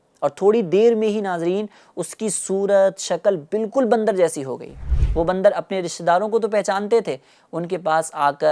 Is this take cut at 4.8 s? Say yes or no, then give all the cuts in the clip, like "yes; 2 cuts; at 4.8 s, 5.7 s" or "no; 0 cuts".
yes; 1 cut; at 4.8 s